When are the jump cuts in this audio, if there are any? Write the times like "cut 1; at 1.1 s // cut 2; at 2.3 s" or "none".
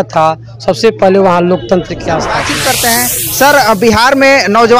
cut 1; at 2.3 s